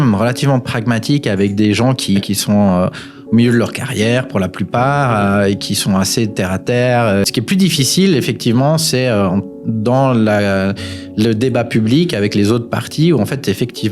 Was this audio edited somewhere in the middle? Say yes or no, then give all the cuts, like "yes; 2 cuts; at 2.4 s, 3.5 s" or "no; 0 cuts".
yes; 2 cuts; at 2.2 s, 7.2 s